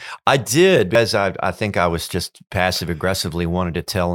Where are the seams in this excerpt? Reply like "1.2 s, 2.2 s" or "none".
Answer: 0.9 s